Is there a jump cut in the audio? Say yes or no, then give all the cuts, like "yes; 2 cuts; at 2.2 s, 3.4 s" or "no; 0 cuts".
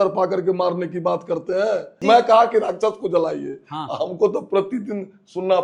yes; 1 cut; at 1.9 s